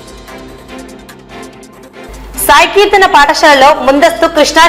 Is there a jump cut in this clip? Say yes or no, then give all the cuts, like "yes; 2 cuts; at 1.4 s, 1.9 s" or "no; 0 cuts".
no; 0 cuts